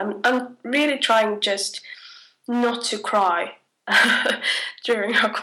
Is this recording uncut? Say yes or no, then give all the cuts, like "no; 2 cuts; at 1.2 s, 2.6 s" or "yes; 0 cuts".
no; 1 cut; at 3.6 s